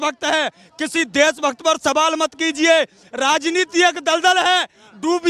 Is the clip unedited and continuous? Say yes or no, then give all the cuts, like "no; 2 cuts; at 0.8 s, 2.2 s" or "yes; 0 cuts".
no; 1 cut; at 3.1 s